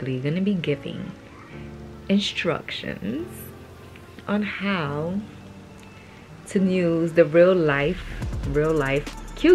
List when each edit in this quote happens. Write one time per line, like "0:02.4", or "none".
none